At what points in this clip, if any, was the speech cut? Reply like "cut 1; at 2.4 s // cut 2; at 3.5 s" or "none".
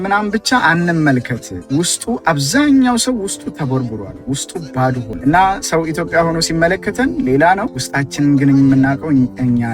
cut 1; at 5.1 s